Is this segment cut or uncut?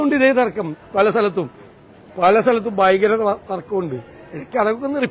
uncut